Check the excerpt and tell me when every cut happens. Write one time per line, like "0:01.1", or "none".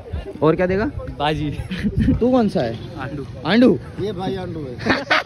0:02.2